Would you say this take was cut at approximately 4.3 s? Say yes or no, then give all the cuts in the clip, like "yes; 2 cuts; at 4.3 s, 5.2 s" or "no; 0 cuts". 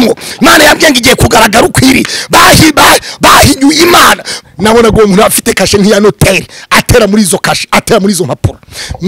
yes; 1 cut; at 4.3 s